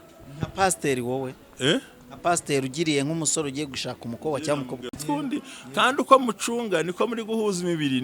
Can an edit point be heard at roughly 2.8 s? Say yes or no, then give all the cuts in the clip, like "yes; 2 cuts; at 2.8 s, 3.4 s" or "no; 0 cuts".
no; 1 cut; at 5.0 s